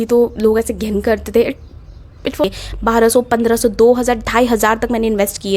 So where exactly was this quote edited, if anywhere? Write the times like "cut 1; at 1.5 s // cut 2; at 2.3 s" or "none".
cut 1; at 2.4 s